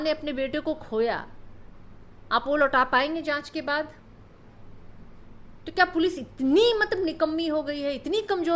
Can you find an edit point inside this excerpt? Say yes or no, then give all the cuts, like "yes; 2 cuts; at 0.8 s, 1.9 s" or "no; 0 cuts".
no; 0 cuts